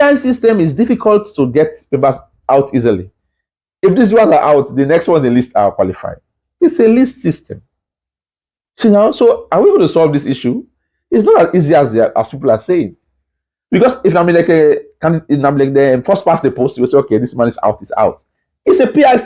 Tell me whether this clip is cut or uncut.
uncut